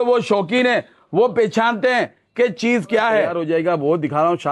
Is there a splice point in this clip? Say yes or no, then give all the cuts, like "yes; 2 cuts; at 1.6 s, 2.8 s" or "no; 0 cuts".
yes; 1 cut; at 3.3 s